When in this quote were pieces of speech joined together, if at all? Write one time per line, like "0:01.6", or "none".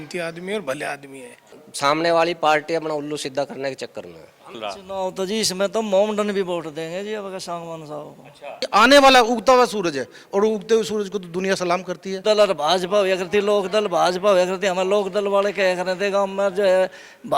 0:01.6
0:04.6
0:08.6
0:12.2